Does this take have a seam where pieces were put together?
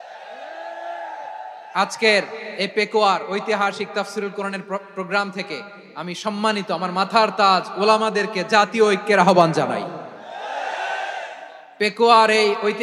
no; 0 cuts

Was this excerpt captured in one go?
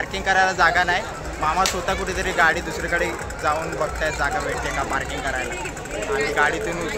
yes; 0 cuts

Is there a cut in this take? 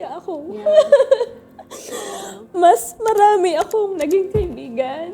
no; 0 cuts

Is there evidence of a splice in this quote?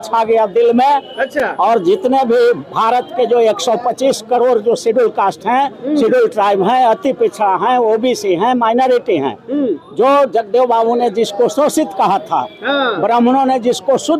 no; 0 cuts

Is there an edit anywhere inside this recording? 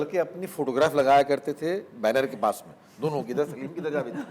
no; 0 cuts

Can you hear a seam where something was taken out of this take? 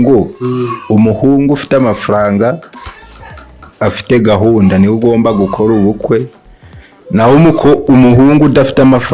no; 0 cuts

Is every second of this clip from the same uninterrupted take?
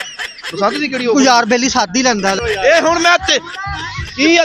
no; 1 cut; at 2.4 s

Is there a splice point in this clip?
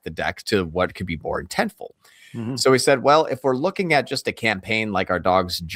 no; 0 cuts

